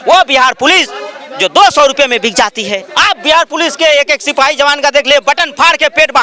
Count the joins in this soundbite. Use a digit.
1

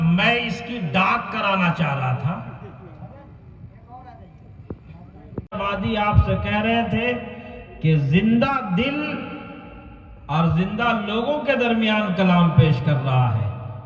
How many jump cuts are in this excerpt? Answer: 1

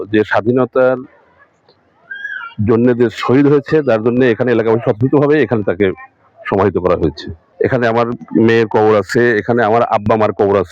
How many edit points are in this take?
0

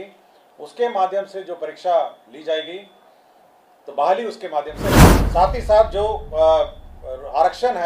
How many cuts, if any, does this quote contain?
1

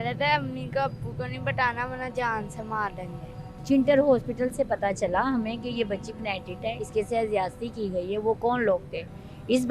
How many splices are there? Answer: 1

